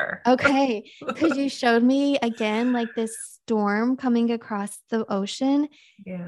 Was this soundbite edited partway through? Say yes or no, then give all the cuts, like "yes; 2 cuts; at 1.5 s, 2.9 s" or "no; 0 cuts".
no; 0 cuts